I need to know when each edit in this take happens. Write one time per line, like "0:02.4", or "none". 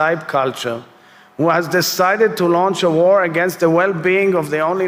none